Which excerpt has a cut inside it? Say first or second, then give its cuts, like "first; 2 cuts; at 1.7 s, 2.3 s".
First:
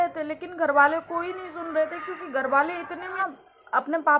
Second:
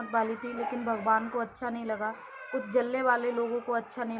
first; 1 cut; at 3.2 s